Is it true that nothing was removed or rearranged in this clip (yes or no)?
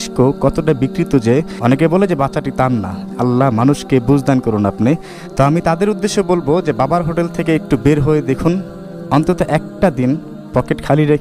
no